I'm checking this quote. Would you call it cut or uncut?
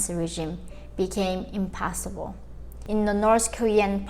cut